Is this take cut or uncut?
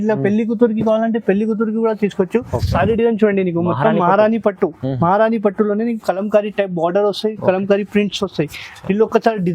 cut